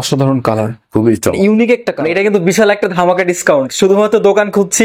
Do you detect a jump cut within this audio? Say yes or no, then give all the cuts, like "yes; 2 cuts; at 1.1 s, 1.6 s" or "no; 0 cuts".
yes; 1 cut; at 1.9 s